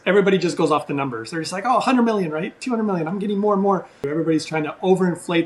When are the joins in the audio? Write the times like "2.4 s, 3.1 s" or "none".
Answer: 4.1 s